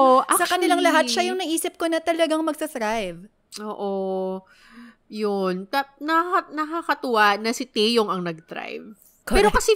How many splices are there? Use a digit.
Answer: 0